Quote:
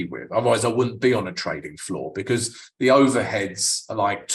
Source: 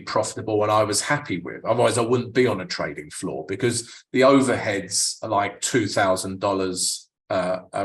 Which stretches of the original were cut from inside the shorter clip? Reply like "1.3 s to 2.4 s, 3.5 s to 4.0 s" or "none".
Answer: none